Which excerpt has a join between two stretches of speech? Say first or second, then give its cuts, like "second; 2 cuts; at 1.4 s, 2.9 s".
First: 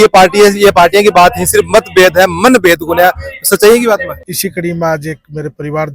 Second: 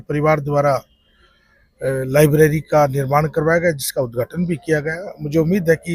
first; 1 cut; at 4.1 s